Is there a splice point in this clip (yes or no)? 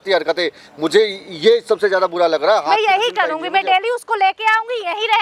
no